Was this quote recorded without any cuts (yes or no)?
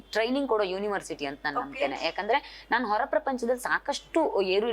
yes